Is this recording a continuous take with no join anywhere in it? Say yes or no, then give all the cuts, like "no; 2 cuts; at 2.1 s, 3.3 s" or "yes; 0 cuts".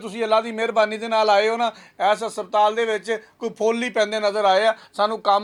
yes; 0 cuts